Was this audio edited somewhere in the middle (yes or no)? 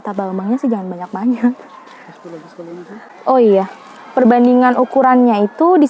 yes